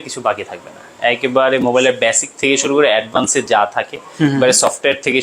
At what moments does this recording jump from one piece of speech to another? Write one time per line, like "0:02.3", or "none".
none